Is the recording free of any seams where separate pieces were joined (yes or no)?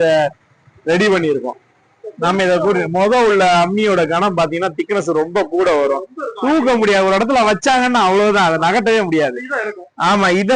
yes